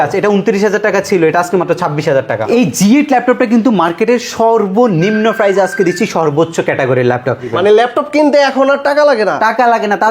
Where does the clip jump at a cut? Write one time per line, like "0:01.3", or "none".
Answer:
0:02.4
0:07.5